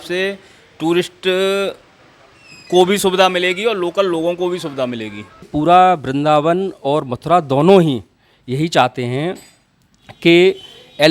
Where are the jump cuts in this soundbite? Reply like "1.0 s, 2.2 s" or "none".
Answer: 5.4 s